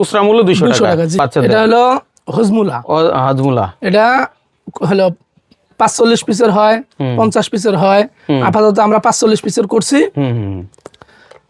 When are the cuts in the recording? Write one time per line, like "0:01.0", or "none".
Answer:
none